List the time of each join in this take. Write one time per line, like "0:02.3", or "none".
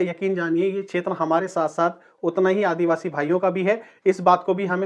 none